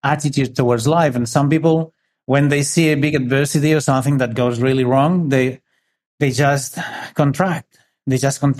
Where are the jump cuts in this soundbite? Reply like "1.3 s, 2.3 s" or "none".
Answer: none